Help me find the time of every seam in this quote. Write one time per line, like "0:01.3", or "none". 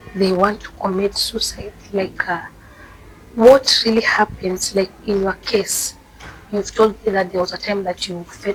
none